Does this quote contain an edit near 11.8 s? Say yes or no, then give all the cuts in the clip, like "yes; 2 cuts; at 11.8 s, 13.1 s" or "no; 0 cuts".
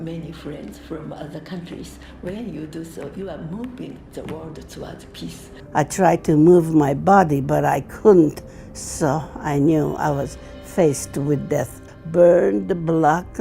yes; 2 cuts; at 5.5 s, 11.8 s